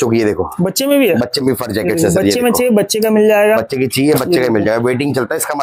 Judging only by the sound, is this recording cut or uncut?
uncut